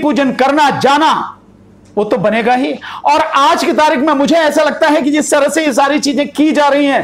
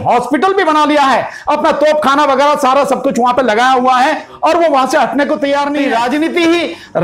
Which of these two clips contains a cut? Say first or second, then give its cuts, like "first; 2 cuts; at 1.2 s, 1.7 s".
second; 1 cut; at 5.9 s